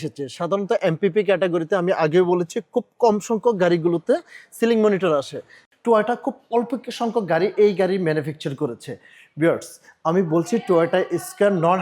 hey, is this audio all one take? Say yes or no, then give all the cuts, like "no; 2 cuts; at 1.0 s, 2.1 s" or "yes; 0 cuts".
no; 1 cut; at 5.5 s